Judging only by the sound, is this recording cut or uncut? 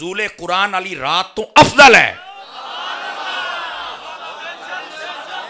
uncut